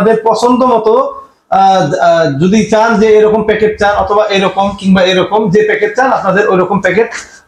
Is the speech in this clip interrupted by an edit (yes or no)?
no